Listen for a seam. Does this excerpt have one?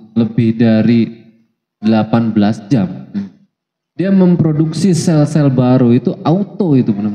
no; 0 cuts

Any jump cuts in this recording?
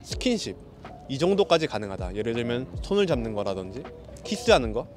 no; 0 cuts

